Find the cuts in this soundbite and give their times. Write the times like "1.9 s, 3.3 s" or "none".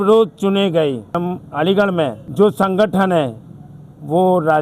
1.2 s, 2.2 s